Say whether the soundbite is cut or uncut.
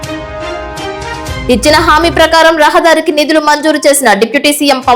uncut